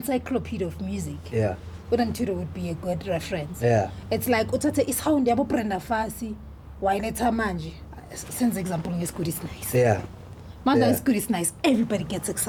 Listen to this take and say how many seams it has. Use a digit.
0